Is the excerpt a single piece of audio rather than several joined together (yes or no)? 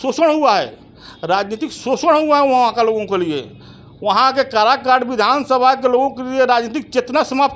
yes